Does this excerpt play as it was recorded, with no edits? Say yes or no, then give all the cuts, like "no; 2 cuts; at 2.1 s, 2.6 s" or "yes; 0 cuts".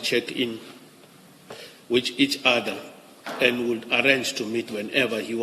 yes; 0 cuts